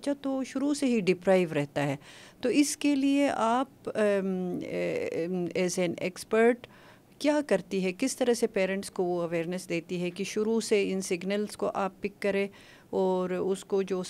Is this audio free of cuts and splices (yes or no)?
yes